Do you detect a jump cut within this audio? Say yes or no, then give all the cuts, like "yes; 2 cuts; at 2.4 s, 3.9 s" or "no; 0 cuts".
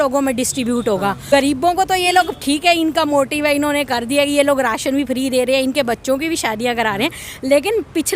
yes; 1 cut; at 1.2 s